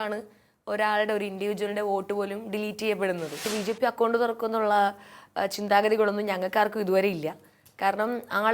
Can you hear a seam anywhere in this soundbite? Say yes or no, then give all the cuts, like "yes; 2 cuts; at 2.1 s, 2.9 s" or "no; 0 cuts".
yes; 1 cut; at 3.5 s